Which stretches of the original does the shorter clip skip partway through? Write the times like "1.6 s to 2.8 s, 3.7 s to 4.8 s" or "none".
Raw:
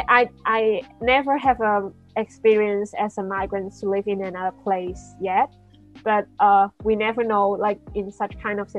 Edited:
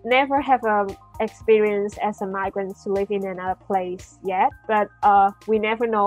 5.6 s to 6.0 s